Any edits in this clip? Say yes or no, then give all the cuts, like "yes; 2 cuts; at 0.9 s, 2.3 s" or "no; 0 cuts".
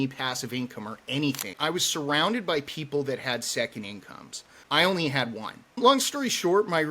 yes; 3 cuts; at 1.5 s, 4.6 s, 5.7 s